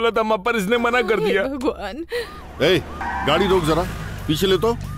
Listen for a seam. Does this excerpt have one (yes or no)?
no